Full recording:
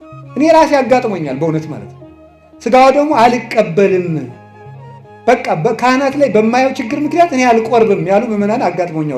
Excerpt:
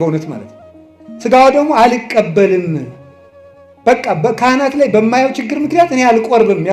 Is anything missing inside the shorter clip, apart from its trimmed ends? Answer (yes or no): no